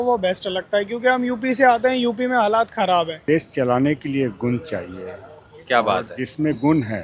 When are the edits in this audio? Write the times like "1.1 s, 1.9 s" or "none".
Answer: 3.2 s